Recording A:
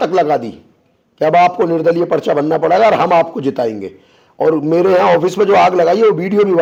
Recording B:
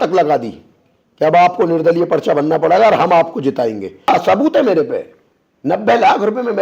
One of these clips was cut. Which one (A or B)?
B